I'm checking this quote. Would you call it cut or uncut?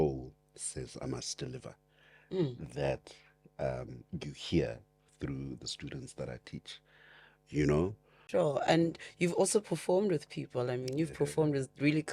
cut